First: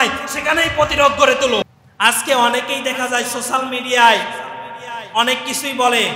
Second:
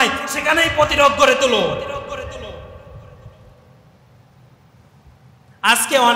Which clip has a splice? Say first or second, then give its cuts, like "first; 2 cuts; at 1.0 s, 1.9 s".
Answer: first; 1 cut; at 1.6 s